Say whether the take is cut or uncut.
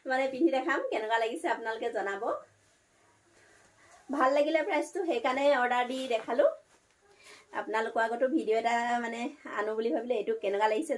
uncut